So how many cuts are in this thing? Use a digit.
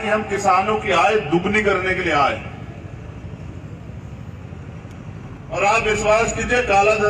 1